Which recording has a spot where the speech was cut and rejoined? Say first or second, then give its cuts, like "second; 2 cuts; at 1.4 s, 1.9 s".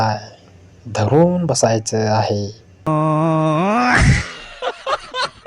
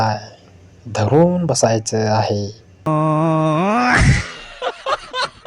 second; 1 cut; at 2.8 s